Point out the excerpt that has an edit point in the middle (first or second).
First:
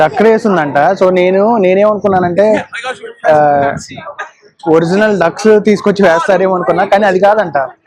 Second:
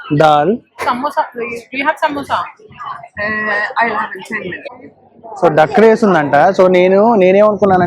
second